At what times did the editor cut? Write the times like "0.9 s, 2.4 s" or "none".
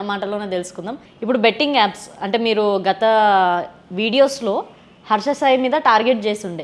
1.1 s